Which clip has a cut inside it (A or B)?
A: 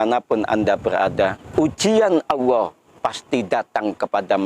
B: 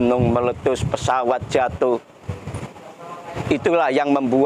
A